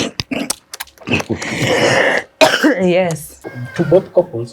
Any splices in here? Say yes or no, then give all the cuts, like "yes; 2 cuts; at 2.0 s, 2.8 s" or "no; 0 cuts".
yes; 1 cut; at 3.5 s